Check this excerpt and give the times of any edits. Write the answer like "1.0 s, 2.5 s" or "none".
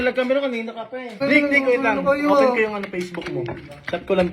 1.2 s

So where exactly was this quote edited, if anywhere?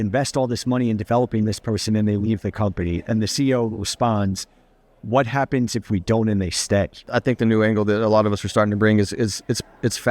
7.1 s

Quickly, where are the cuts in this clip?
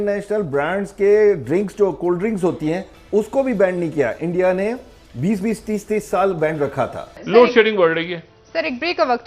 7.2 s

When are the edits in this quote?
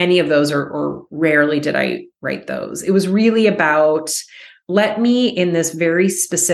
1.0 s

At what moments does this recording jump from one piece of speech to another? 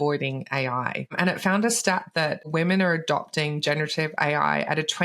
1.1 s, 2.5 s

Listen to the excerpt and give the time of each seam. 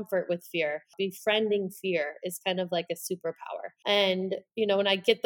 3.7 s

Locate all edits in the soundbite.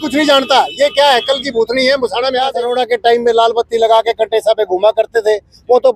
2.6 s

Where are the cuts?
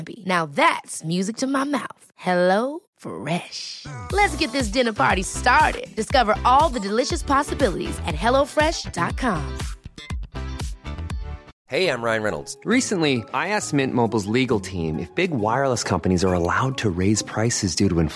11.5 s

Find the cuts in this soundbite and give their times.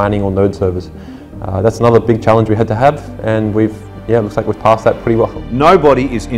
5.3 s

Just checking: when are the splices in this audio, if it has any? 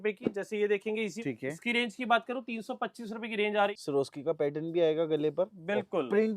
1.2 s, 3.7 s

